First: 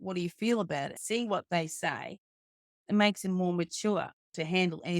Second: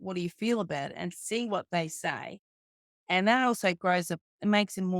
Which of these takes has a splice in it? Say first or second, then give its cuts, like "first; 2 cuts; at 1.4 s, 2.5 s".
first; 2 cuts; at 1.0 s, 2.7 s